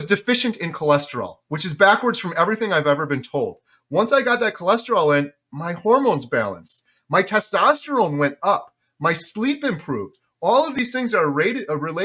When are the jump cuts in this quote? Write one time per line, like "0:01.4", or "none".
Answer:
none